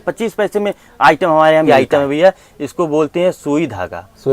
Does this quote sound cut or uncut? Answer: cut